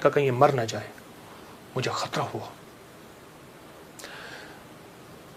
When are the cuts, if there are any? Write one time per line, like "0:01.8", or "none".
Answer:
none